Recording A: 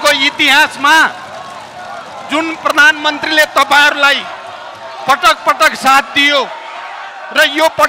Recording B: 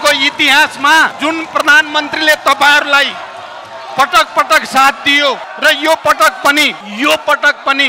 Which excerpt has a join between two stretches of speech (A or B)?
B